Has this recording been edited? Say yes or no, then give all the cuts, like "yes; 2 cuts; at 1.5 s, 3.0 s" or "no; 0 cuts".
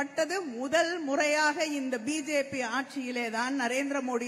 no; 0 cuts